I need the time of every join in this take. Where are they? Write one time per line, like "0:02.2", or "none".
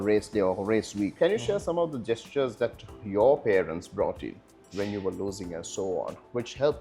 0:01.1